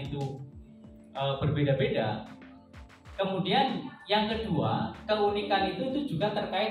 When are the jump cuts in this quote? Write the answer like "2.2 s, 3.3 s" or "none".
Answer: none